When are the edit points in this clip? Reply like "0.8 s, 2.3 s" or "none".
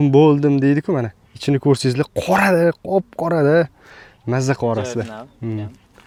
none